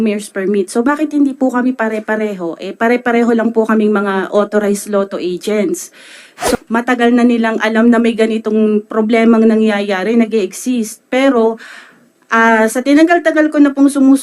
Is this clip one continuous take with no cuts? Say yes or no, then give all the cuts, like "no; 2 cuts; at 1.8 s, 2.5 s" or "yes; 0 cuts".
no; 1 cut; at 6.5 s